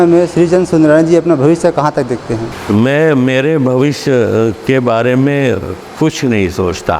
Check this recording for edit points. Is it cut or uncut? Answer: cut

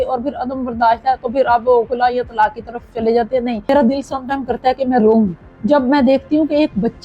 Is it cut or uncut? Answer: cut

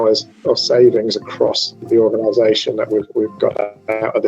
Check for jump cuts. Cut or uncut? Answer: cut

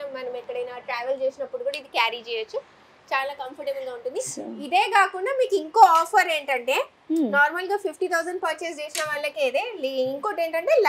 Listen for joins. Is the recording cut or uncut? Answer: uncut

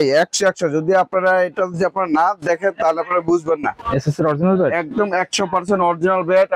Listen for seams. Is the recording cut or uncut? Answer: cut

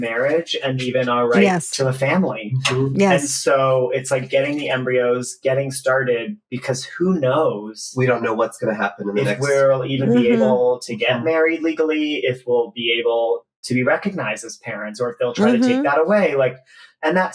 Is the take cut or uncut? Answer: uncut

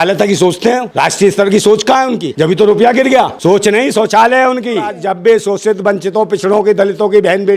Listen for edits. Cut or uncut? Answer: cut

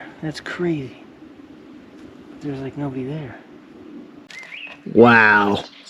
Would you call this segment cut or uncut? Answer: cut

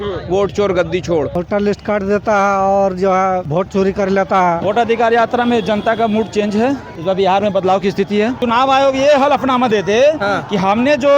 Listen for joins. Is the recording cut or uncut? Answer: cut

